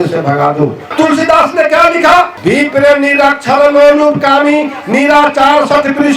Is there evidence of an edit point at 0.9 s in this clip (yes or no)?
yes